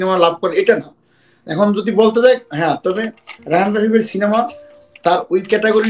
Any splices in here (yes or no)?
no